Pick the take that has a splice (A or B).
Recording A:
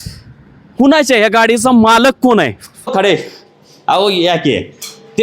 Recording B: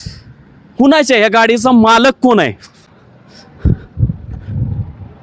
A